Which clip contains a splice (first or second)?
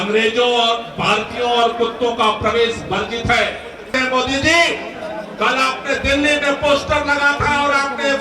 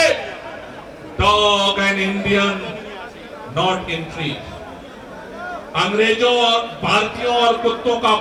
first